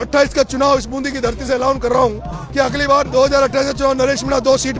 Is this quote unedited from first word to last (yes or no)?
yes